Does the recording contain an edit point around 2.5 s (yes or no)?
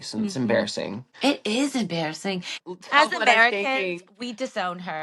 yes